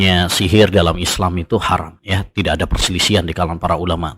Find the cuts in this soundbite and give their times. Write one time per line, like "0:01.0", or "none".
0:02.0